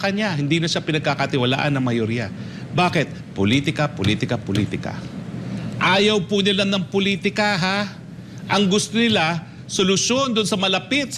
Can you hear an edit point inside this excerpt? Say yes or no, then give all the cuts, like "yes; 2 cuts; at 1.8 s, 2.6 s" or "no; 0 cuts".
no; 0 cuts